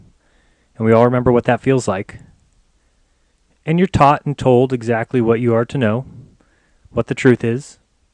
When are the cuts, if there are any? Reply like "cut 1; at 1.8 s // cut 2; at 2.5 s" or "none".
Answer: cut 1; at 1.0 s